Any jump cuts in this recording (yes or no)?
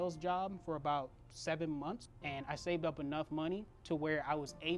yes